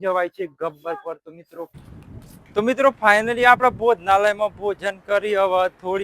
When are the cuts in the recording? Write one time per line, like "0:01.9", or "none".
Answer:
0:01.7